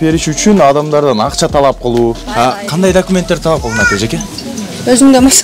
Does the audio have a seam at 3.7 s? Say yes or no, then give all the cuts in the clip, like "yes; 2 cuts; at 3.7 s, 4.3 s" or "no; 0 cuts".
no; 1 cut; at 2.2 s